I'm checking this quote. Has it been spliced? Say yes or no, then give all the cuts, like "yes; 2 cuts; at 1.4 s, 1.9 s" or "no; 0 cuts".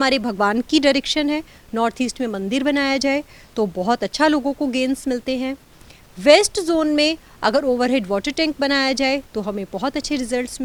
no; 0 cuts